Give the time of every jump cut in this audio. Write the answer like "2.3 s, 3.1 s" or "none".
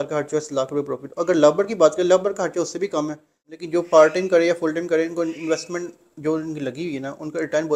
3.5 s